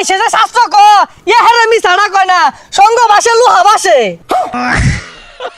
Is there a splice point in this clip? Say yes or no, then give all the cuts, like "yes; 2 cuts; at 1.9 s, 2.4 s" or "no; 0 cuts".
yes; 1 cut; at 4.6 s